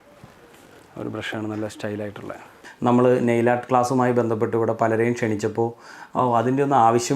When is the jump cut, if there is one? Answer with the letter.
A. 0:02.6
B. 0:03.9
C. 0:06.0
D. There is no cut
A